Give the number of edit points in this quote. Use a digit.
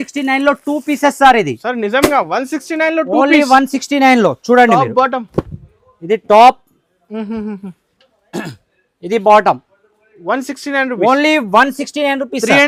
0